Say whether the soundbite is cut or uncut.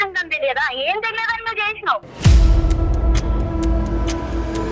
cut